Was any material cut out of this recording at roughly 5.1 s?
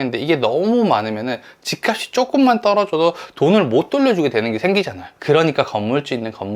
yes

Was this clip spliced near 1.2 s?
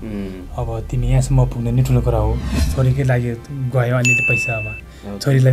no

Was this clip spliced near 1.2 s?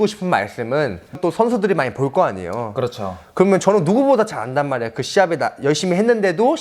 yes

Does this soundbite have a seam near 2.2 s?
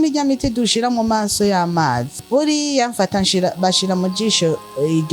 yes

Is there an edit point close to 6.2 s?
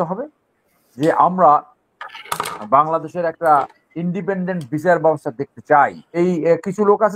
yes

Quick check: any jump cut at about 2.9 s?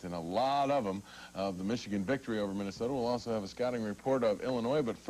no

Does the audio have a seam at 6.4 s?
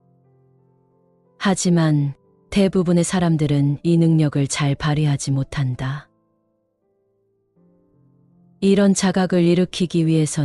no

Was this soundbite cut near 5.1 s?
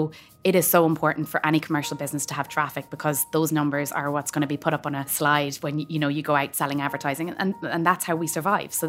yes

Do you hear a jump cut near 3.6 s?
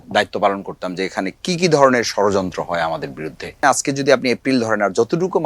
yes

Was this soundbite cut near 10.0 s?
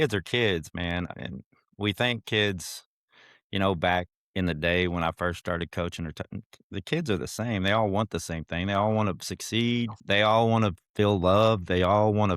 yes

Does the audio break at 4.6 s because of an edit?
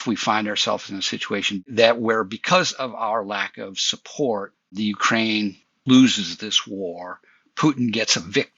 yes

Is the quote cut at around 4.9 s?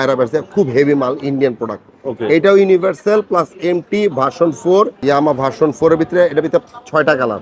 yes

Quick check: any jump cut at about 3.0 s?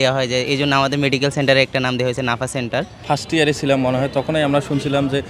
yes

